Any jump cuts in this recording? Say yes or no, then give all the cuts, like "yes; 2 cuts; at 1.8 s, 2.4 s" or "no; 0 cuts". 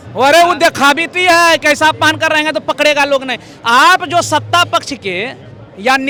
no; 0 cuts